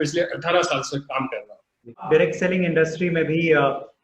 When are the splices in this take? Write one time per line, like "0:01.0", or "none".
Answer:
0:02.0